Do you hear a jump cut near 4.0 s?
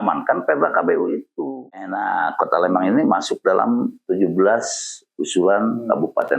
no; 1 cut; at 1.7 s

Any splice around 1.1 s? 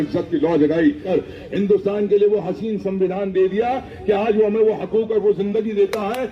yes; 1 cut; at 1.1 s

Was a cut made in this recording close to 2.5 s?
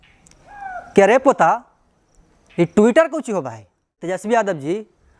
no; 1 cut; at 4.1 s

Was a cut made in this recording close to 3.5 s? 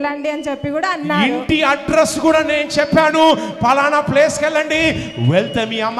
no; 0 cuts

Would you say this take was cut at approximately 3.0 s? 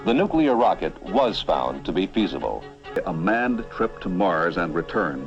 yes; 1 cut; at 3.0 s

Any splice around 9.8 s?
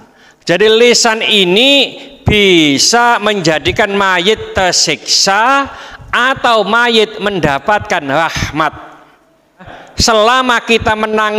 yes; 1 cut; at 9.8 s

